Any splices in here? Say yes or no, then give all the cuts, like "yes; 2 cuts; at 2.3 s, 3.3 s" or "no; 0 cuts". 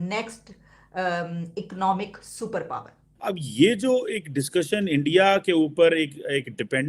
yes; 1 cut; at 3.1 s